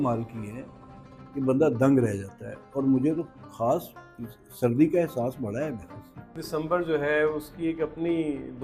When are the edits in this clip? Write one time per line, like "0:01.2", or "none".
0:06.4

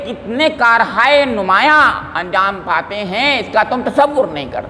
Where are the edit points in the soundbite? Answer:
none

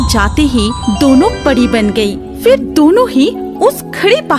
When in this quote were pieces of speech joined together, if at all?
none

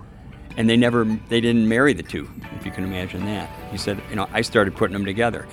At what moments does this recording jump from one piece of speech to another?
0:02.4

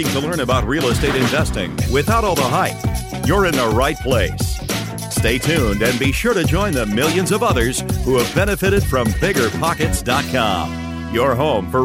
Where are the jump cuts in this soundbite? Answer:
none

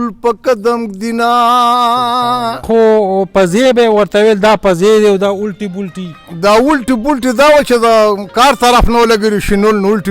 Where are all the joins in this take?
0:02.7

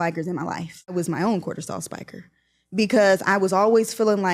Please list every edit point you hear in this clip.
0:00.9

